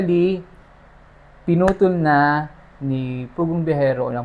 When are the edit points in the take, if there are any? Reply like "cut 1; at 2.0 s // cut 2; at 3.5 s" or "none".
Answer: none